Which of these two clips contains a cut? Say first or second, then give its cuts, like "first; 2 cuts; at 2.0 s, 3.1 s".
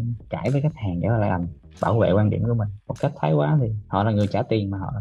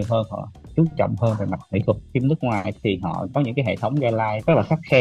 second; 1 cut; at 2.1 s